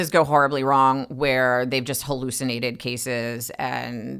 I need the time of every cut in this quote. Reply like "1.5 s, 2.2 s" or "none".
none